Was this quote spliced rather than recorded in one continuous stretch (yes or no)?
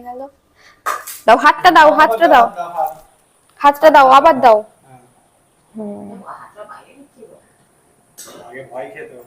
yes